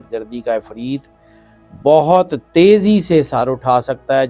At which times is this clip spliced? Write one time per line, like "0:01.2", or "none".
none